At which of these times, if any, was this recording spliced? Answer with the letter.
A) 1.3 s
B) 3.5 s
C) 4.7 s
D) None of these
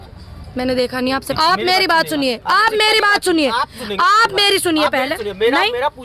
A